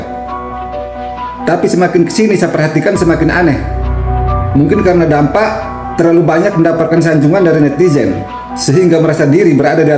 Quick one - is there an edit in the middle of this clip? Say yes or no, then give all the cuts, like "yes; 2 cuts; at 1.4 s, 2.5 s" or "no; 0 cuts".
no; 0 cuts